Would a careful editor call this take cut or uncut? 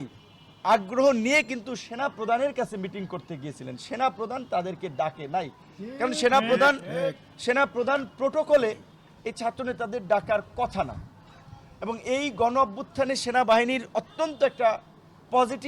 uncut